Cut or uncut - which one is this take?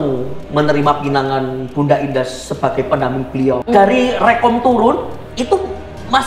cut